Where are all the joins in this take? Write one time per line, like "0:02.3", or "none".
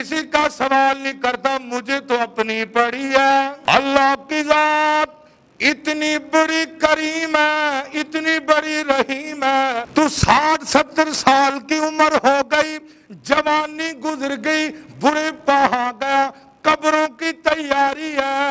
0:03.6
0:09.9